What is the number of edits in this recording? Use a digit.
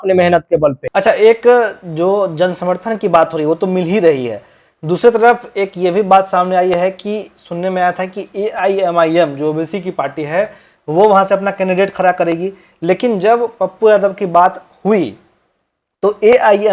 0